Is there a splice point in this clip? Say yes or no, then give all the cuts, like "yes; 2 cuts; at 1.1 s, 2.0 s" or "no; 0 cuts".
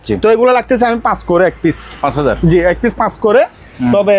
no; 0 cuts